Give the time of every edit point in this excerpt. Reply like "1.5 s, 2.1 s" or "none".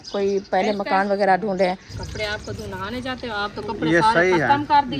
1.9 s